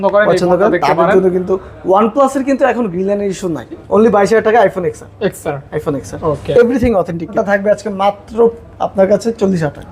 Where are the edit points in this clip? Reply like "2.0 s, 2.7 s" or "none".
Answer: 3.8 s, 7.3 s